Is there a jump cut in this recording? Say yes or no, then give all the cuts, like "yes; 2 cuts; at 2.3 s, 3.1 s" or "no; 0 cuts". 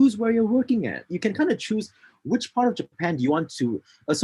yes; 1 cut; at 1.0 s